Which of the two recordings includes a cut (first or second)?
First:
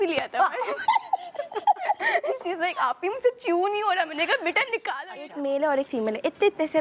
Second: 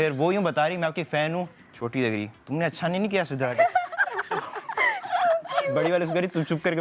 first